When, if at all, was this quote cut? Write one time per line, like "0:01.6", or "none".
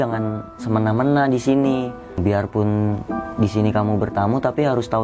0:02.0

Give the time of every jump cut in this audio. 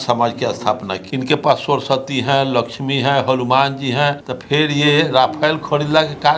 0:01.0
0:04.3

